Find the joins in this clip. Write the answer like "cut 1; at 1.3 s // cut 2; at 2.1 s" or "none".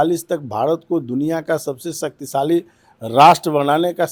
none